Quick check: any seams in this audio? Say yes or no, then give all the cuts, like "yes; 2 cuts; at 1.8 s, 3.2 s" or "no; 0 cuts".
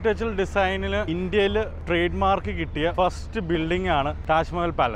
yes; 4 cuts; at 1.1 s, 1.8 s, 2.9 s, 4.2 s